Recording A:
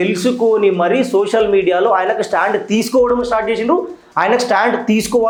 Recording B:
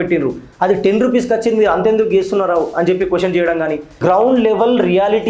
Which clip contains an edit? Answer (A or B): B